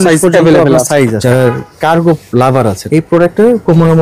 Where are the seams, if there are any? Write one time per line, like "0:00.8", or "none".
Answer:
0:01.2
0:02.8